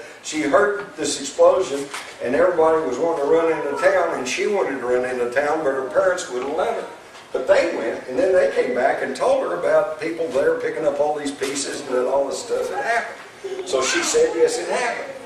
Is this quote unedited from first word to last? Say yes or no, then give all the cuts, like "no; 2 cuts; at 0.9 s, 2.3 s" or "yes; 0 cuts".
yes; 0 cuts